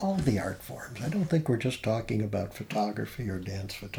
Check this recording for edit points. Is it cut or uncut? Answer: uncut